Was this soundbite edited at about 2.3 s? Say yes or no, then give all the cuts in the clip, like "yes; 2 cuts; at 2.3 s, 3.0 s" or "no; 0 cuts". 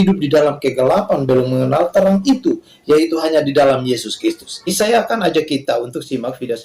no; 1 cut; at 4.6 s